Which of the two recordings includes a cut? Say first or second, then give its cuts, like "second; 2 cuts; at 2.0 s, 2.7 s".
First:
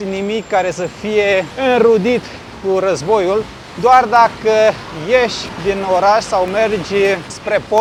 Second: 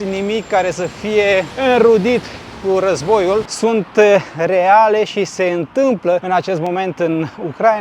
second; 1 cut; at 3.5 s